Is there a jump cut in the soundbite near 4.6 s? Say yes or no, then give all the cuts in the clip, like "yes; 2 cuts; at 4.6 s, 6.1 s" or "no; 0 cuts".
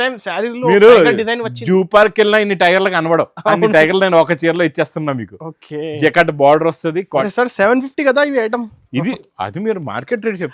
no; 1 cut; at 7.3 s